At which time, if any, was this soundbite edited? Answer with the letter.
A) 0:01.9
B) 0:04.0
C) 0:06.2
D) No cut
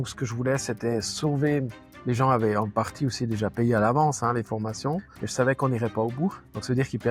A